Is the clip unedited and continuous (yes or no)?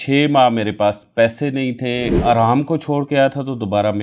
no